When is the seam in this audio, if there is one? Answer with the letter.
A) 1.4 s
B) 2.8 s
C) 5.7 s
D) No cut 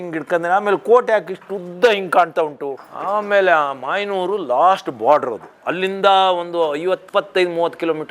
B